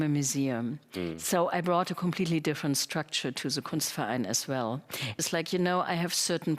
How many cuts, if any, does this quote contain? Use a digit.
1